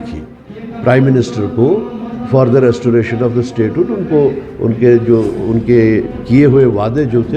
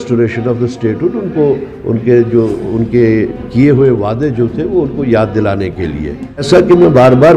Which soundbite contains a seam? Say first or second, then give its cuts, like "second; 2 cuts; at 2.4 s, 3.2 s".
second; 1 cut; at 6.5 s